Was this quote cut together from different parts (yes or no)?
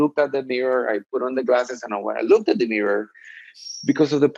no